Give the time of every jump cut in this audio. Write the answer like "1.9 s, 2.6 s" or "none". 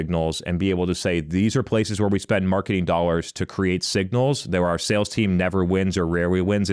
none